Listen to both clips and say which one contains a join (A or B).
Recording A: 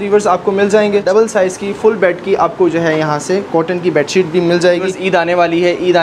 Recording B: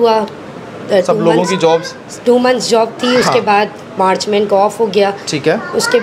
A